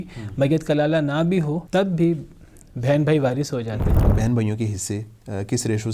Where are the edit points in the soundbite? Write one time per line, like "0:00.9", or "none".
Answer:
0:01.6
0:04.0